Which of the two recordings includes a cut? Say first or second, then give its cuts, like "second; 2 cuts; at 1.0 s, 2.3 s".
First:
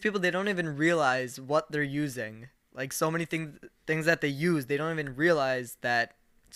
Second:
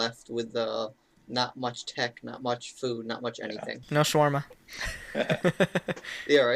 second; 1 cut; at 3.8 s